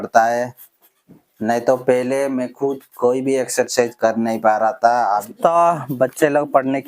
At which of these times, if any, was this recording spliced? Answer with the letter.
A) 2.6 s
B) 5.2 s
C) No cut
B